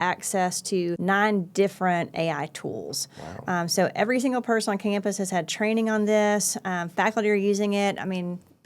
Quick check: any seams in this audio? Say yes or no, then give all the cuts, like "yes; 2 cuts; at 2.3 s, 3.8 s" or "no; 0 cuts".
yes; 1 cut; at 1.0 s